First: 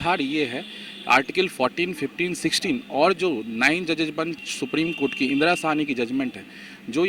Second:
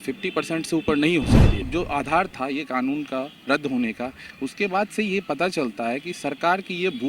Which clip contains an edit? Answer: second; 1 cut; at 1.7 s

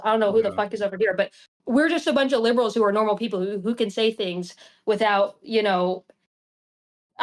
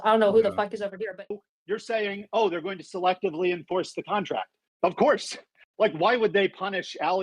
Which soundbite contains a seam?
second; 1 cut; at 1.2 s

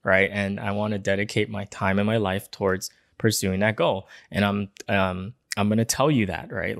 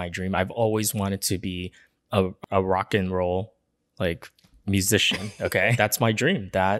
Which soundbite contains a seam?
second; 2 cuts; at 2.4 s, 5.7 s

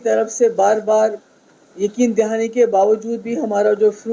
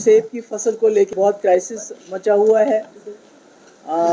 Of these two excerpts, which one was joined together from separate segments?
second; 1 cut; at 1.1 s

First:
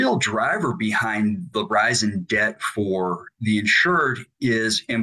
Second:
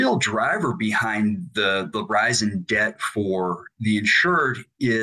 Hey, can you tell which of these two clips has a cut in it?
first; 1 cut; at 1.5 s

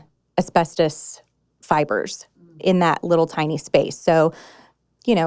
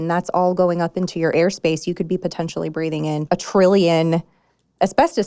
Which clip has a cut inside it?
second; 2 cuts; at 1.3 s, 3.2 s

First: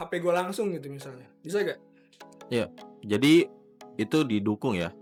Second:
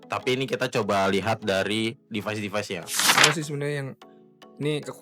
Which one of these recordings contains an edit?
second; 1 cut; at 3.1 s

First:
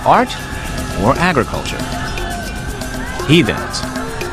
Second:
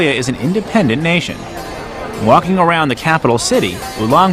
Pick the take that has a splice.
first; 1 cut; at 3.1 s

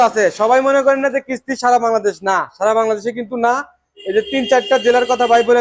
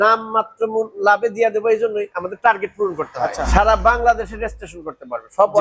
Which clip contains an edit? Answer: second; 1 cut; at 3.4 s

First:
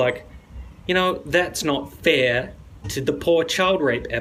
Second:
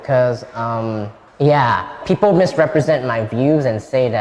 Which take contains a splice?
second; 1 cut; at 1.2 s

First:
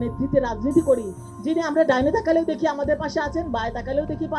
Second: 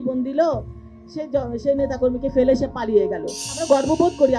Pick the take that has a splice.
second; 1 cut; at 3.5 s

